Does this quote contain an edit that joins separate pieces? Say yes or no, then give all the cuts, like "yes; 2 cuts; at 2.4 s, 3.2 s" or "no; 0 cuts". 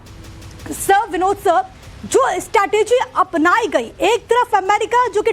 yes; 1 cut; at 3.9 s